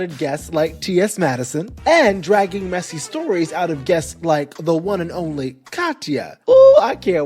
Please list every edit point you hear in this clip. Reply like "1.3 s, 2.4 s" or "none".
1.6 s, 6.3 s